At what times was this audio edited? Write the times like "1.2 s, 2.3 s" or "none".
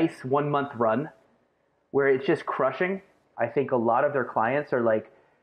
3.2 s